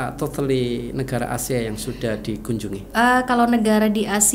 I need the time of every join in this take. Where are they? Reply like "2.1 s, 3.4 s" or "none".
none